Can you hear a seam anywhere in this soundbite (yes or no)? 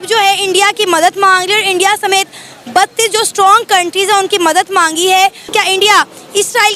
yes